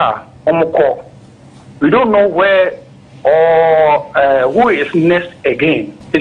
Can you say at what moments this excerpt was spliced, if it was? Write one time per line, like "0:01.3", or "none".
none